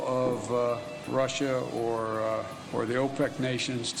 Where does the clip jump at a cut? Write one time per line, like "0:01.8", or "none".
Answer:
0:01.1
0:02.6